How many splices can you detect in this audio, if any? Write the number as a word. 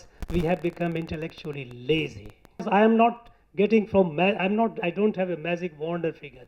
one